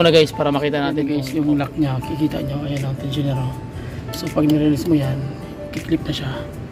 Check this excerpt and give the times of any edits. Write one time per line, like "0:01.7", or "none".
0:01.0